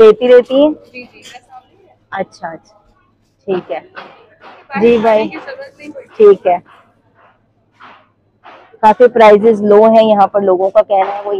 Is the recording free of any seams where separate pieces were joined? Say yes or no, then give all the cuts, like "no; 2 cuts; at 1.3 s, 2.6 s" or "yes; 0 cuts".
yes; 0 cuts